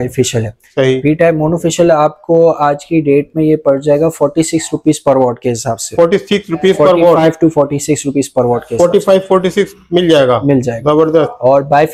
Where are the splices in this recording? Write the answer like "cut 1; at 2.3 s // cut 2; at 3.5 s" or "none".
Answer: none